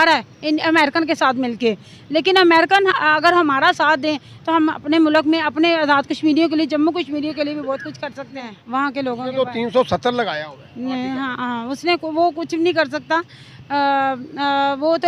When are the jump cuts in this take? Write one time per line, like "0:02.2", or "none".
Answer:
none

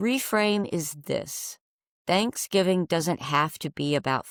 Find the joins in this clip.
none

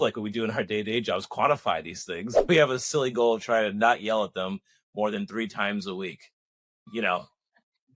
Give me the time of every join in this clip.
0:02.3
0:06.8

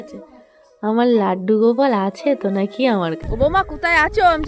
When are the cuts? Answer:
0:03.2

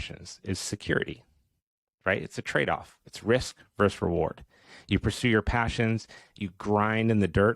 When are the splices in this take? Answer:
none

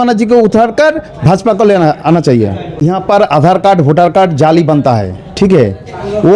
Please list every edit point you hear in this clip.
0:02.7

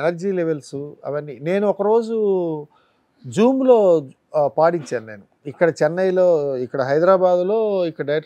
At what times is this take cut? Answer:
none

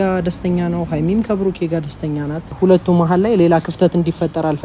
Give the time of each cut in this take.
0:02.5

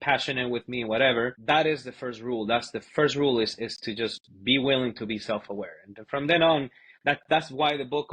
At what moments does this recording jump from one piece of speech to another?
0:01.4

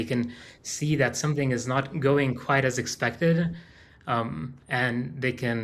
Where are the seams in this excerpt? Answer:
none

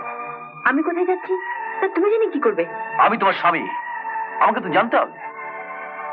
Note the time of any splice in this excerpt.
none

